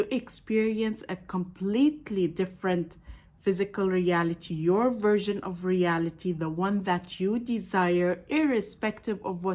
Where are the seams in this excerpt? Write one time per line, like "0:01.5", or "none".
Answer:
none